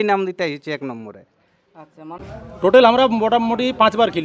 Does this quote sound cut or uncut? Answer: cut